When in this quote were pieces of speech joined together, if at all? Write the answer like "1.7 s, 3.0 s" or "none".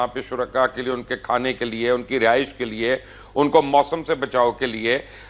none